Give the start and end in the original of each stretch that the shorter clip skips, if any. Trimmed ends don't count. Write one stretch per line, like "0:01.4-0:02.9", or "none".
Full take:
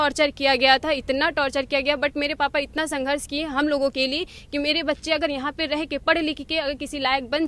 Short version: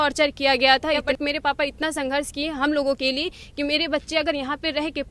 0:01.1-0:02.0